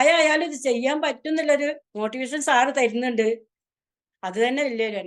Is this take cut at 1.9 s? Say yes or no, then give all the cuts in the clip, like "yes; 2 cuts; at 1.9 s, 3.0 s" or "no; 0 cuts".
yes; 1 cut; at 1.9 s